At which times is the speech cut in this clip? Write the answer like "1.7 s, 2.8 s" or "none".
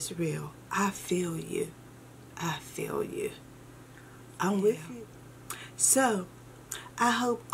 4.9 s